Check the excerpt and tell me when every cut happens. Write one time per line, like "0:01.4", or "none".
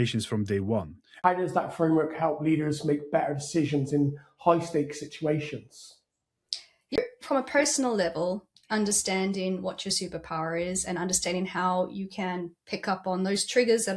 0:01.0
0:07.0